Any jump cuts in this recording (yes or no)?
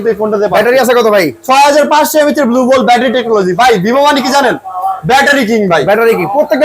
no